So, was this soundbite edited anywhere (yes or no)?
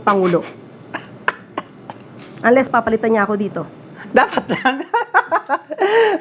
no